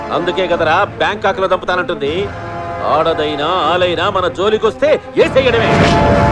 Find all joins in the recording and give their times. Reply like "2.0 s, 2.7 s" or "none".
none